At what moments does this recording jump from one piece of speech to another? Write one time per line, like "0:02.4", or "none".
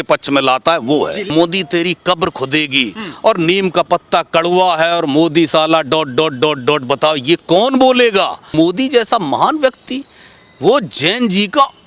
0:01.3
0:08.5